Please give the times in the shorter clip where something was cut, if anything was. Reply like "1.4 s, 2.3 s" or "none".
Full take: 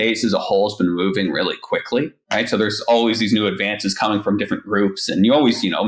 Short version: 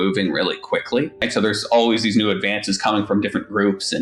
1.3 s